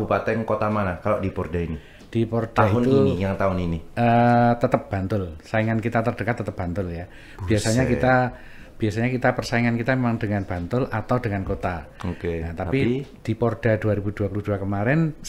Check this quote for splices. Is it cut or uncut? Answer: uncut